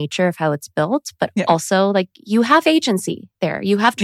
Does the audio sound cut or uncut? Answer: uncut